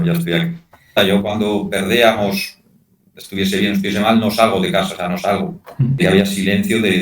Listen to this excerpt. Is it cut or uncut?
cut